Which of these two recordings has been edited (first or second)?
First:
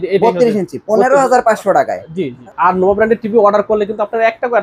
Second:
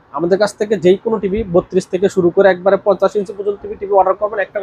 first